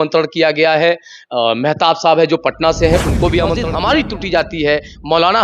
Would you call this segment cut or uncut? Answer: cut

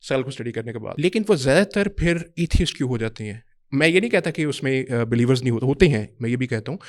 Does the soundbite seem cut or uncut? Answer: cut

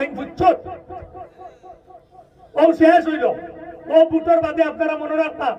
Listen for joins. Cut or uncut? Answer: uncut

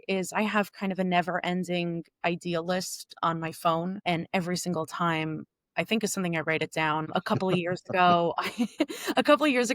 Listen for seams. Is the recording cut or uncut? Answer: cut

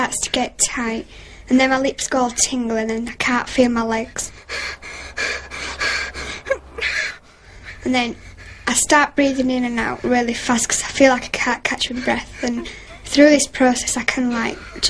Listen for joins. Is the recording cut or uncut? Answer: cut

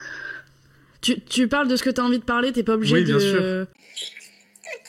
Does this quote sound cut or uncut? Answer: uncut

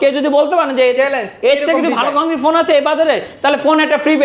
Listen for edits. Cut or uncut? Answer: uncut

